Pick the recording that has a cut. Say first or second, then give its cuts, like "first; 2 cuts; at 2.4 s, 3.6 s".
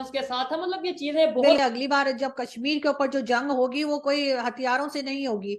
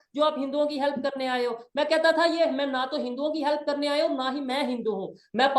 first; 1 cut; at 1.6 s